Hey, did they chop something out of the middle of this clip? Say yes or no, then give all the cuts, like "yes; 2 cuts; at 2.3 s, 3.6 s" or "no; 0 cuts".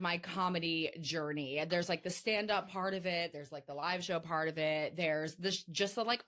no; 0 cuts